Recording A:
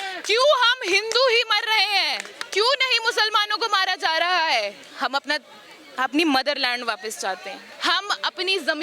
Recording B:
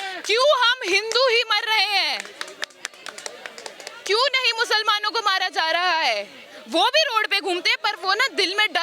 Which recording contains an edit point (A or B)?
A